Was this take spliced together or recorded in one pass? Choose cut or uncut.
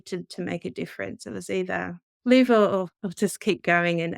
cut